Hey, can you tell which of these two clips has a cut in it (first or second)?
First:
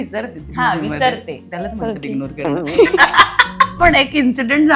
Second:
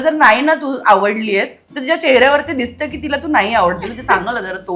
first